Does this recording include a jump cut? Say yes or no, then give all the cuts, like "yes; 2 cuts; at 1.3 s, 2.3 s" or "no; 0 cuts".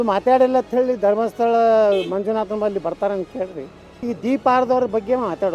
yes; 1 cut; at 4.0 s